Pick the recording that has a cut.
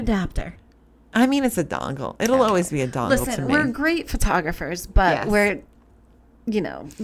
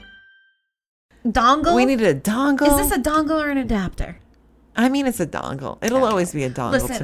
second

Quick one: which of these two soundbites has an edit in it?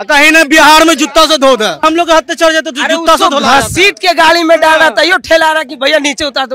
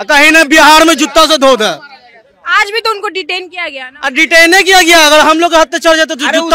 first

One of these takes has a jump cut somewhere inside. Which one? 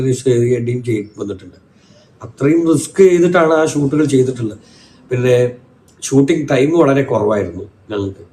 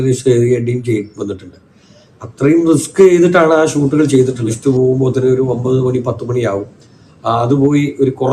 second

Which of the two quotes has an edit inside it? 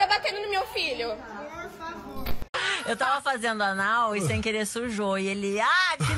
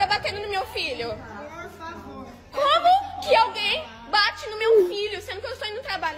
first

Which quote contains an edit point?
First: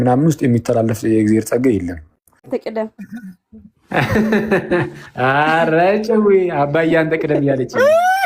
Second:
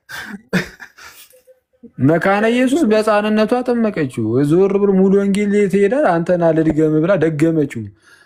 first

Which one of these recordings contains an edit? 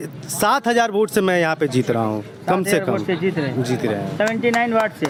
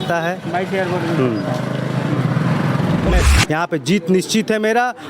second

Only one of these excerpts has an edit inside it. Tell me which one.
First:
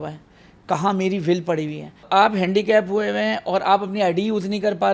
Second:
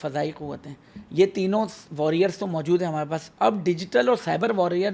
first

